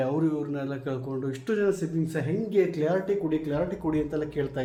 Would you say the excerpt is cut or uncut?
uncut